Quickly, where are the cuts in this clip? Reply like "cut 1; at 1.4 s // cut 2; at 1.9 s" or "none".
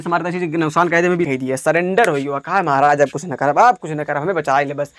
cut 1; at 1.2 s